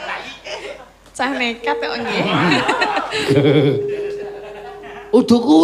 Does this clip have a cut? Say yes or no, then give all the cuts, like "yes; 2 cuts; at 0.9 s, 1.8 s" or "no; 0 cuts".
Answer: no; 0 cuts